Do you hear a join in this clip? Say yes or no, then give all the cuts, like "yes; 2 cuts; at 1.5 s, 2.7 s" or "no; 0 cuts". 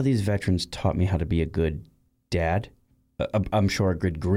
yes; 1 cut; at 2.8 s